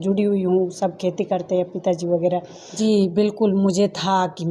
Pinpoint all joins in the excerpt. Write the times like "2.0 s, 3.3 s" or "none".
2.8 s